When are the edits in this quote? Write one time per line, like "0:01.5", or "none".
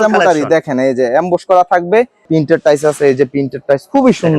0:02.3

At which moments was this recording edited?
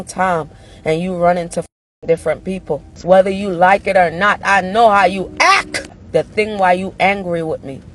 0:03.0
0:06.0

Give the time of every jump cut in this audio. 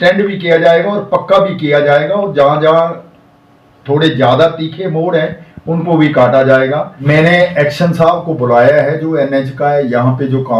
0:06.9

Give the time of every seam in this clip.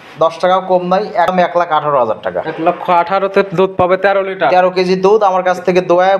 0:01.3

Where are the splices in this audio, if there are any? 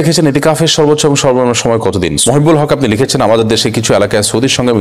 0:02.2

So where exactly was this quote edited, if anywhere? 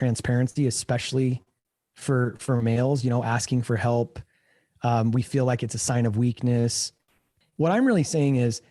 0:07.3

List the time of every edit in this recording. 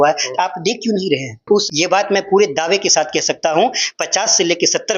0:01.4

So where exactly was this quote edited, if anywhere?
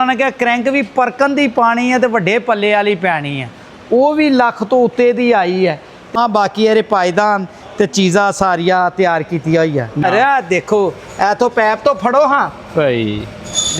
0:06.1
0:10.0

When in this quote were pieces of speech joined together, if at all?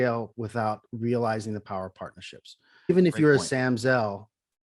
0:02.9

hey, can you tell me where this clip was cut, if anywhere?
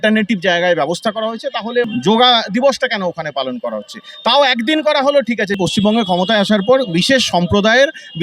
0:01.9
0:05.6

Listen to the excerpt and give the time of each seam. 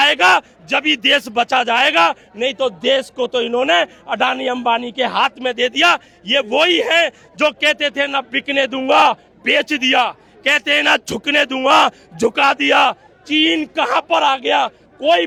none

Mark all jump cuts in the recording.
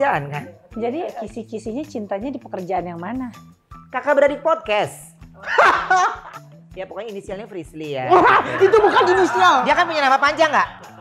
0:01.1
0:06.2

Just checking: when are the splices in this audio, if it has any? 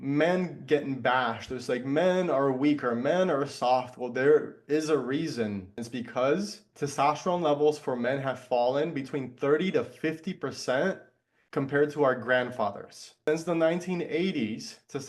0:05.8
0:06.6
0:13.3

